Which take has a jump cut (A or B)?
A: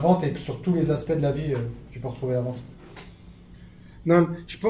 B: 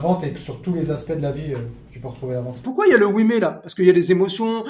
B